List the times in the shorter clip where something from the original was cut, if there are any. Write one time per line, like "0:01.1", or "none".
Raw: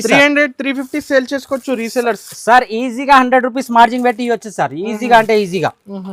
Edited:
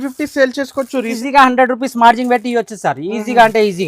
0:01.1